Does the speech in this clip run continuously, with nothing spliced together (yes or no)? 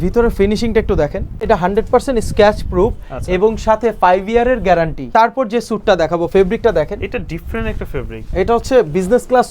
no